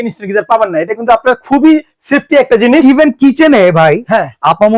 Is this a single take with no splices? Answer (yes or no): yes